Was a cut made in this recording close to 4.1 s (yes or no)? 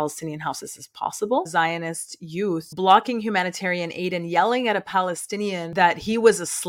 no